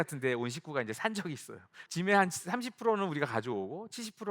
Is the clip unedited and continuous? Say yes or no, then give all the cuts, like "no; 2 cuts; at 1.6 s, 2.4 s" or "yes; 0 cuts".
no; 1 cut; at 1.8 s